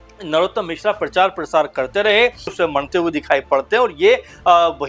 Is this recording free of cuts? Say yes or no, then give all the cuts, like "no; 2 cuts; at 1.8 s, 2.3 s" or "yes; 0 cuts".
no; 1 cut; at 2.5 s